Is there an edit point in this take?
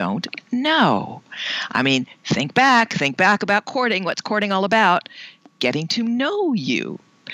no; 0 cuts

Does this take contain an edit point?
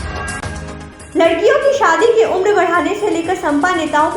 yes; 1 cut; at 0.9 s

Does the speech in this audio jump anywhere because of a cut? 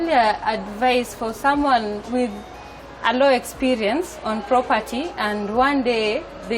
no; 0 cuts

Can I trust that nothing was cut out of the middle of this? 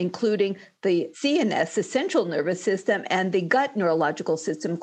no; 1 cut; at 1.1 s

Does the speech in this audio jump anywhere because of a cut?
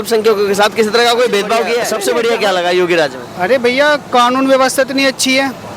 yes; 1 cut; at 1.9 s

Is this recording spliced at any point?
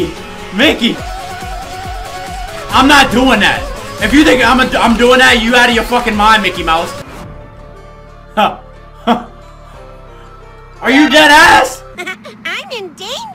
yes; 2 cuts; at 1.0 s, 7.0 s

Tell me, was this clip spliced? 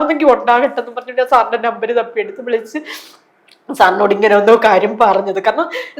no; 0 cuts

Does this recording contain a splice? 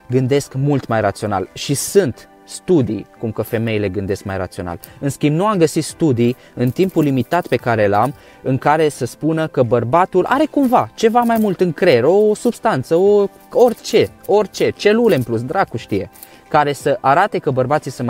no; 0 cuts

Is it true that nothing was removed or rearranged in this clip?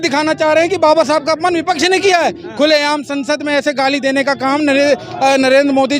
yes; 0 cuts

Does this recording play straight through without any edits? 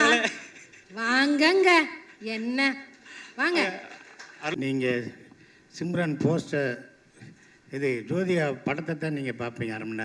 no; 1 cut; at 4.5 s

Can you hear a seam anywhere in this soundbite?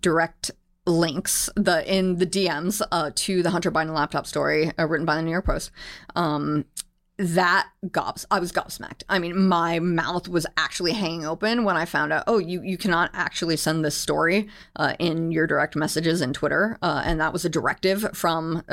no; 0 cuts

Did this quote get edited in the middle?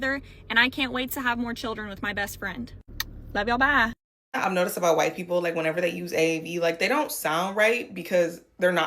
yes; 2 cuts; at 2.8 s, 4.0 s

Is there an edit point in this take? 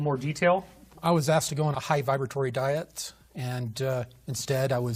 no; 0 cuts

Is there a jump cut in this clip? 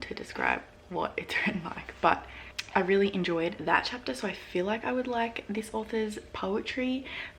no; 0 cuts

